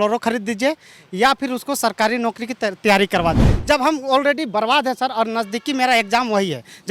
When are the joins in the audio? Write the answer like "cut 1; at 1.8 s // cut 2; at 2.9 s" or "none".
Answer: cut 1; at 3.5 s